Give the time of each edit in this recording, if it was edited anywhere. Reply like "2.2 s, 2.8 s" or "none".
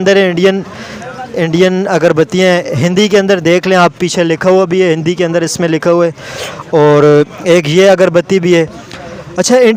none